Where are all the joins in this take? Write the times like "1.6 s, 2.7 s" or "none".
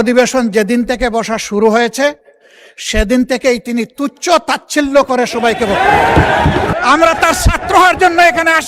6.7 s